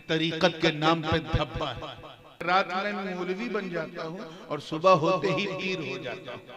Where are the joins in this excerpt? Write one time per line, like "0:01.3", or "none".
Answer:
0:02.4